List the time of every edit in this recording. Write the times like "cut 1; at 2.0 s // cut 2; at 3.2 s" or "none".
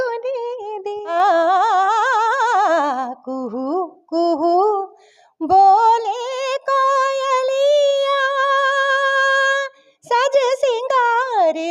cut 1; at 1.1 s